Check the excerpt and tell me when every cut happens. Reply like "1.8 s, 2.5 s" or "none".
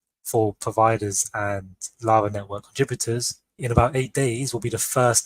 3.5 s